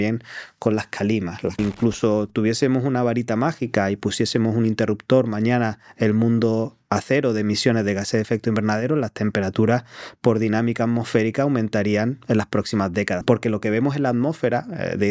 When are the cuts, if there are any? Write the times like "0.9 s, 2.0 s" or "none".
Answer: 1.6 s, 13.2 s